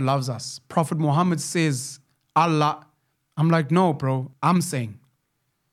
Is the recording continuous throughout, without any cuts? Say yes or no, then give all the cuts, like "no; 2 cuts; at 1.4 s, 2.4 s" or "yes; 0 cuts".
no; 1 cut; at 4.3 s